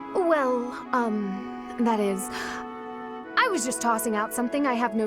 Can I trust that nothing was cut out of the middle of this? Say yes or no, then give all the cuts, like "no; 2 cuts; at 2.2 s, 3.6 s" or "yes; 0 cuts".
yes; 0 cuts